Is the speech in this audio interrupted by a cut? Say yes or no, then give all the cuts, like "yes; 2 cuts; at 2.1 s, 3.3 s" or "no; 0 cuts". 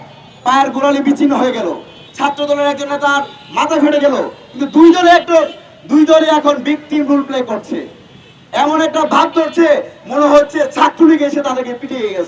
no; 0 cuts